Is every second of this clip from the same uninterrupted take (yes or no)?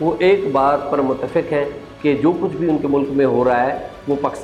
yes